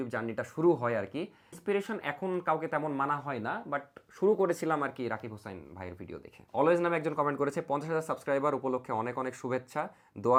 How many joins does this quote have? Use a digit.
0